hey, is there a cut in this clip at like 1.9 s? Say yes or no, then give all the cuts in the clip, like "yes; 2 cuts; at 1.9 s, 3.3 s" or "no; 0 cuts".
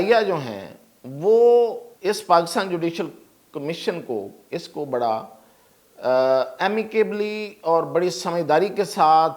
yes; 2 cuts; at 1.9 s, 4.4 s